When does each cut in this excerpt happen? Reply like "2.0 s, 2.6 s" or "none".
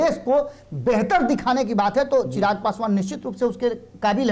none